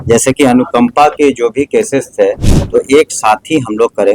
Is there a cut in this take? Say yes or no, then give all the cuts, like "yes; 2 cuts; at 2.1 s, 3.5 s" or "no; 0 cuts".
yes; 1 cut; at 2.5 s